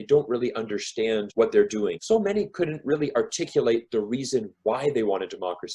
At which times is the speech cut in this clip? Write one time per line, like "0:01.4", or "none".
0:01.3
0:02.0